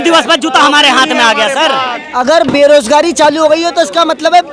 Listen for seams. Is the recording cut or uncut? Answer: cut